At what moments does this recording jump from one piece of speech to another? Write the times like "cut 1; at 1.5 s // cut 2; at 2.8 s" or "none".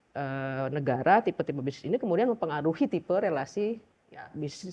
none